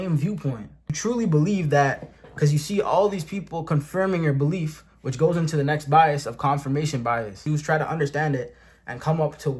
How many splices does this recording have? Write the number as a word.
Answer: two